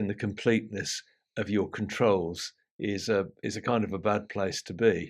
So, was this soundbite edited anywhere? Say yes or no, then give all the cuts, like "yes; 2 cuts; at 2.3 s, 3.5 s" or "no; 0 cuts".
no; 0 cuts